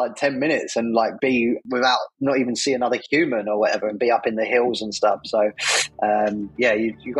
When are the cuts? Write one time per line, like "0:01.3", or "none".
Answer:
0:01.1